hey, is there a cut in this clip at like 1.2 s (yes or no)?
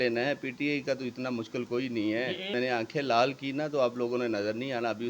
no